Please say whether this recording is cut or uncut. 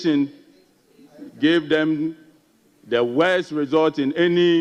uncut